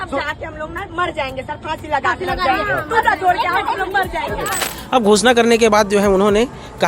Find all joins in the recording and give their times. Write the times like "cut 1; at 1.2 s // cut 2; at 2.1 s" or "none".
cut 1; at 4.6 s